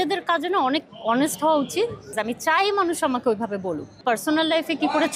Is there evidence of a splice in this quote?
yes; 2 cuts; at 2.1 s, 3.9 s

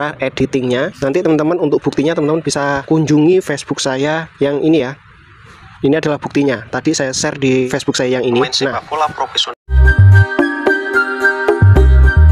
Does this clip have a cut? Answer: yes; 2 cuts; at 0.9 s, 9.4 s

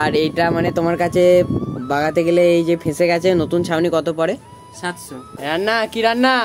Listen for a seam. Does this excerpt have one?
yes; 1 cut; at 5.3 s

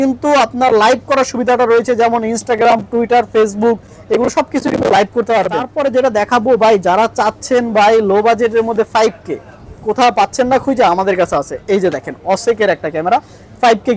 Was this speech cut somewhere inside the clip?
yes; 1 cut; at 5.6 s

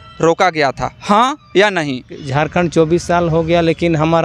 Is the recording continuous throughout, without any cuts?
no; 1 cut; at 2.2 s

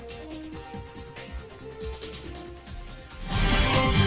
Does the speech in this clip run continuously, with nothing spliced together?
yes; 0 cuts

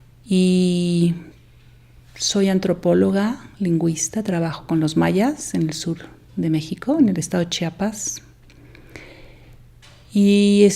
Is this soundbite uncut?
no; 1 cut; at 2.6 s

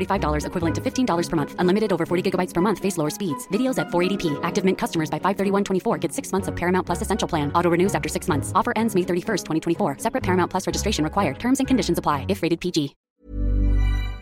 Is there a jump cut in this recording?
yes; 1 cut; at 13.0 s

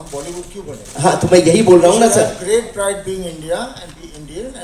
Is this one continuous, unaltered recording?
yes; 0 cuts

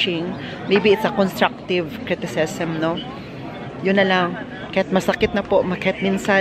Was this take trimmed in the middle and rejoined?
no; 0 cuts

